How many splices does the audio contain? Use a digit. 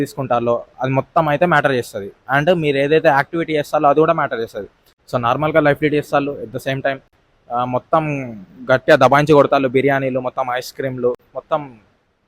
0